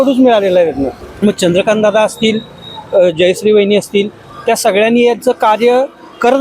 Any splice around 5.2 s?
no; 1 cut; at 1.0 s

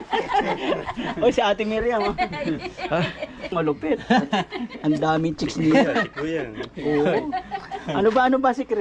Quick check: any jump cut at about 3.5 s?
yes; 1 cut; at 3.5 s

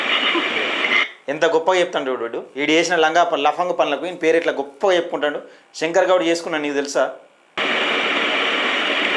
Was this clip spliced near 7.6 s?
yes; 1 cut; at 7.6 s

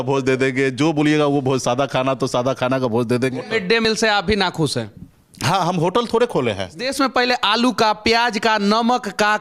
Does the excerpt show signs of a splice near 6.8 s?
yes; 2 cuts; at 3.8 s, 6.8 s

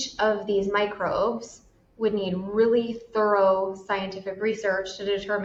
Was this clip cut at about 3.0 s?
no; 0 cuts

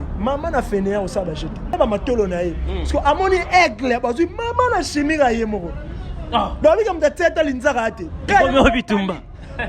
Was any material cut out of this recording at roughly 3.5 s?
no; 1 cut; at 1.7 s

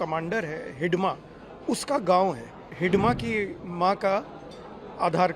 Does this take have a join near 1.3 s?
no; 1 cut; at 2.7 s

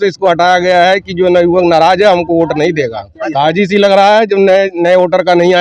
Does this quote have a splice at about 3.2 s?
yes; 1 cut; at 3.2 s

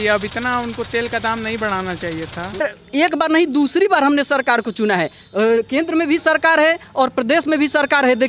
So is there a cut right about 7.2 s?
no; 1 cut; at 2.6 s

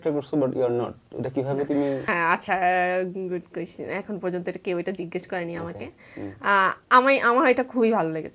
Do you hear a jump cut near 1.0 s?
no; 0 cuts

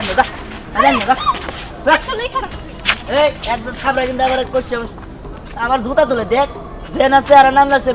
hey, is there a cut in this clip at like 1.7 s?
no; 0 cuts

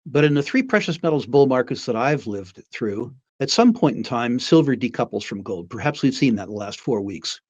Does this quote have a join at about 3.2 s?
yes; 1 cut; at 3.2 s

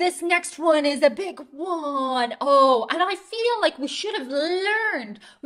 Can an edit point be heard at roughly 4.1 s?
no; 0 cuts

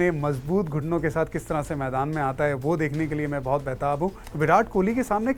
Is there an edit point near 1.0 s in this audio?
no; 1 cut; at 4.2 s

